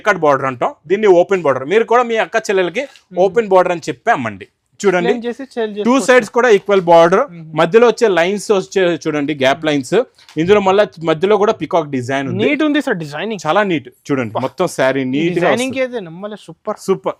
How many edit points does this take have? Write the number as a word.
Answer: zero